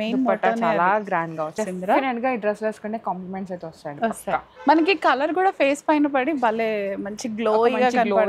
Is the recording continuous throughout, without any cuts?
no; 1 cut; at 1.5 s

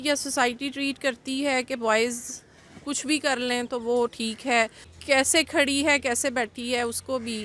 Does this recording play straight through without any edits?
no; 1 cut; at 4.9 s

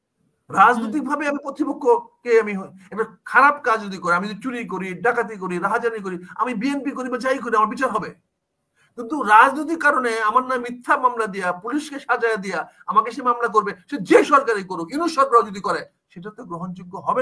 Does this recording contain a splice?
no; 0 cuts

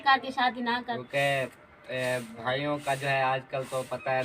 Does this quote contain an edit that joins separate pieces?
yes; 1 cut; at 0.9 s

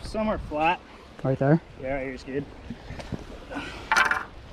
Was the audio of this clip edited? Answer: no; 0 cuts

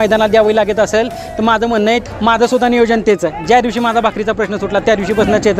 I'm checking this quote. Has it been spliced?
yes; 1 cut; at 2.0 s

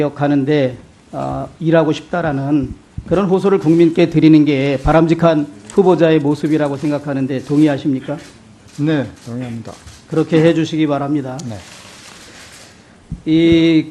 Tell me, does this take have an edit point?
no; 0 cuts

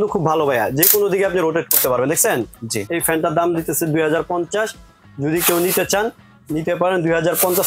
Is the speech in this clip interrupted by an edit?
no; 0 cuts

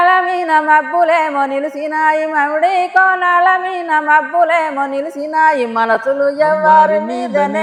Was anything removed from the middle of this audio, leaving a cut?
no; 0 cuts

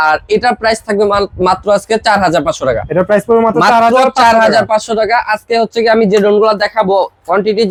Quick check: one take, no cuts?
yes; 0 cuts

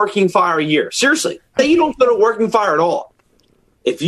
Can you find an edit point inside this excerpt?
yes; 1 cut; at 1.6 s

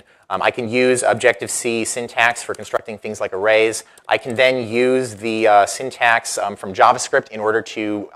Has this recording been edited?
yes; 1 cut; at 6.3 s

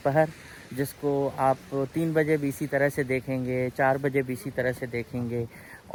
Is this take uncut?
yes; 0 cuts

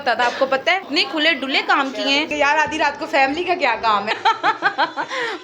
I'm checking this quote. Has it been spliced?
yes; 3 cuts; at 0.9 s, 2.3 s, 4.1 s

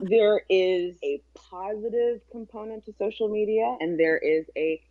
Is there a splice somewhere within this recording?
yes; 2 cuts; at 1.0 s, 3.8 s

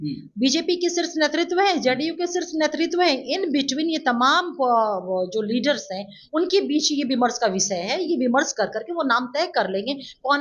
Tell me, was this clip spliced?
no; 0 cuts

